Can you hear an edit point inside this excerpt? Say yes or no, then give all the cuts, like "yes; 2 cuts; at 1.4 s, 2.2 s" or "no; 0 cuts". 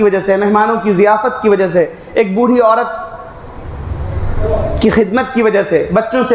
no; 0 cuts